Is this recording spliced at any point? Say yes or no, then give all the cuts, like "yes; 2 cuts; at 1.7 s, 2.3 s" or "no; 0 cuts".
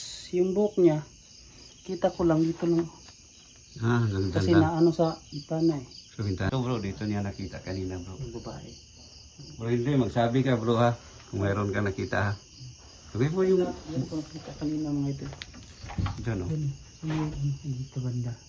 yes; 1 cut; at 6.5 s